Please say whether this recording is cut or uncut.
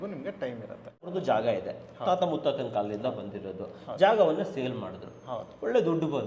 cut